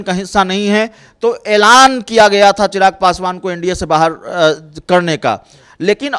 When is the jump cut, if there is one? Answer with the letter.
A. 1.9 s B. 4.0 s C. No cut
C